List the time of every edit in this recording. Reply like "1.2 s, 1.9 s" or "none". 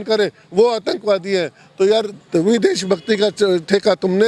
none